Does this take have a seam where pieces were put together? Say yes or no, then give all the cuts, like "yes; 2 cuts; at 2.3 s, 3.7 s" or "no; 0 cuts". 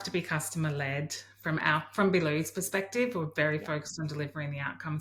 no; 0 cuts